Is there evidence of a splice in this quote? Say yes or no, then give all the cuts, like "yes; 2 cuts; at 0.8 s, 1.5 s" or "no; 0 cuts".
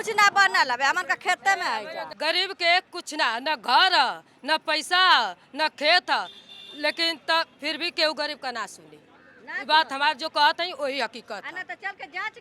yes; 1 cut; at 2.1 s